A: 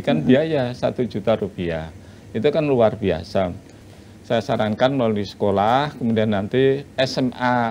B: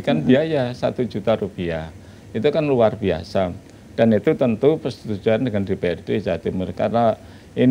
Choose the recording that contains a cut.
A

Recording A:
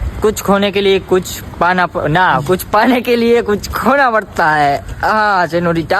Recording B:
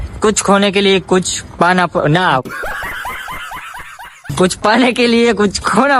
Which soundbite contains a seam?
A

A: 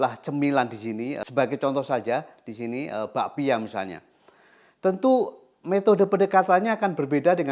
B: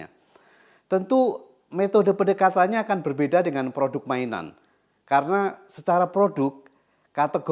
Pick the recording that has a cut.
A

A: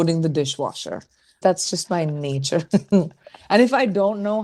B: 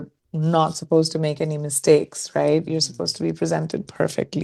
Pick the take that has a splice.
A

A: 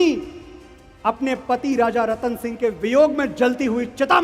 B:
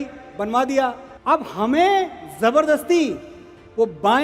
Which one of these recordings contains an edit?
B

